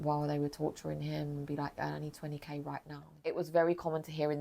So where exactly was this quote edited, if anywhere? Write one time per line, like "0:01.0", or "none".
0:03.1